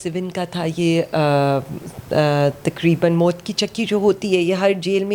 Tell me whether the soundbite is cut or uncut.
uncut